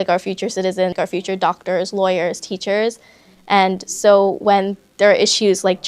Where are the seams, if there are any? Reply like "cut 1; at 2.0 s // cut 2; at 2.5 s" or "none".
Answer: cut 1; at 0.9 s